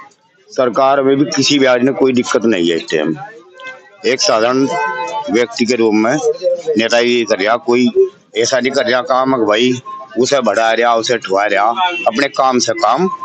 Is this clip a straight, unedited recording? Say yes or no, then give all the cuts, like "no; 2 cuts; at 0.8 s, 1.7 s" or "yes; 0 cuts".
yes; 0 cuts